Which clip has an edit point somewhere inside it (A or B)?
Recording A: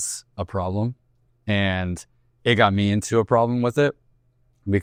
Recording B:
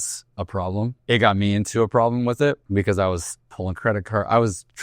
B